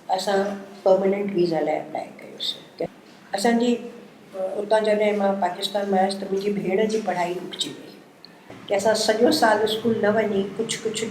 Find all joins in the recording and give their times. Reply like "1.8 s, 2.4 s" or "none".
2.9 s, 8.4 s